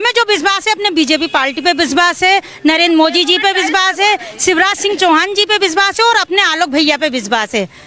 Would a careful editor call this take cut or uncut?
uncut